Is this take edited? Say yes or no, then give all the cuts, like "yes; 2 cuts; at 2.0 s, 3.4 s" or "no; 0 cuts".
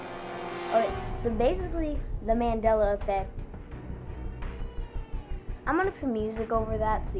no; 0 cuts